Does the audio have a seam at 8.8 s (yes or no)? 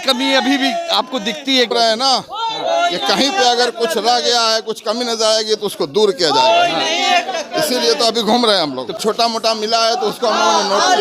yes